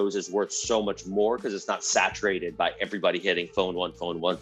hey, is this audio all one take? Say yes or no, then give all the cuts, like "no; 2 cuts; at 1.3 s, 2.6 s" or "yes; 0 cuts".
yes; 0 cuts